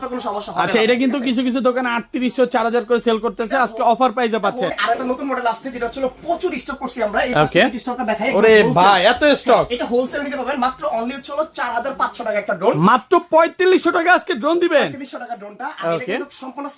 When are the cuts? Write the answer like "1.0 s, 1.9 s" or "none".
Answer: none

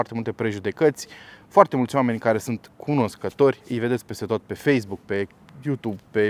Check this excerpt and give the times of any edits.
none

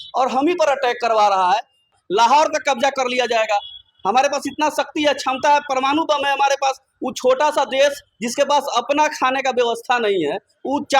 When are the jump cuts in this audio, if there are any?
2.0 s

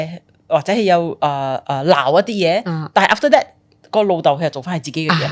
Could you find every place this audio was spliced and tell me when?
none

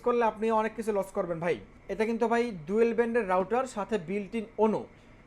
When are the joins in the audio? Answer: 1.8 s

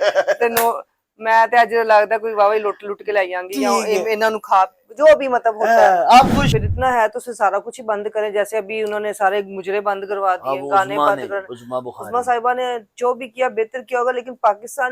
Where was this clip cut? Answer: 6.5 s

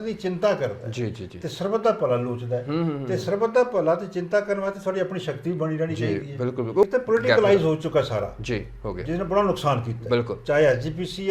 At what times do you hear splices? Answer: 6.8 s

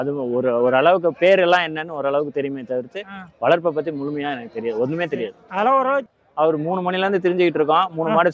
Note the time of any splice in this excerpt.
6.1 s

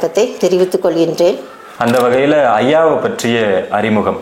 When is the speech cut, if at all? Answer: 1.4 s

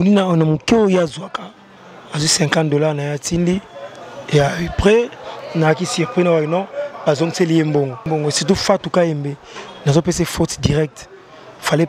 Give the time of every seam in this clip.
8.0 s

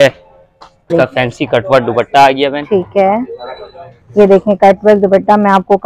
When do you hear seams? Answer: 0.9 s

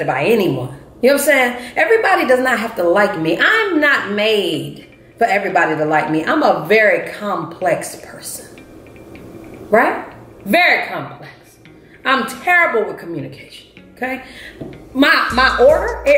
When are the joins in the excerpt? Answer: none

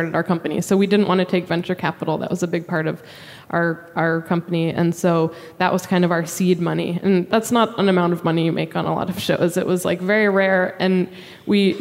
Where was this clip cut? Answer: 7.3 s

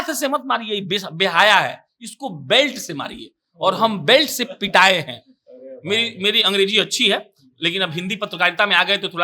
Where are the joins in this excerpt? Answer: none

